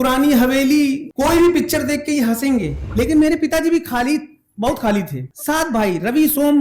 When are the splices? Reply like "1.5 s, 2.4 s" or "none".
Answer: 1.1 s, 2.8 s, 5.2 s